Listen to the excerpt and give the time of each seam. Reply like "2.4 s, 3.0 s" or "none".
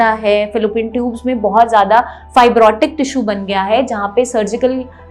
none

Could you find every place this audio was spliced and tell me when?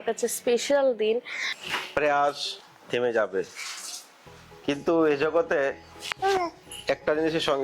1.5 s

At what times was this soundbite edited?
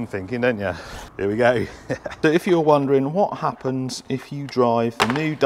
2.1 s

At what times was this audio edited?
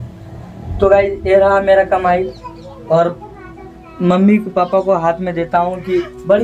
none

